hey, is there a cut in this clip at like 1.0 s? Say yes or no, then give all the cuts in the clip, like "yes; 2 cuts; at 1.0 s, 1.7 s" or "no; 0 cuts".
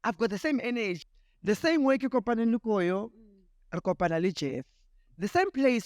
yes; 1 cut; at 1.0 s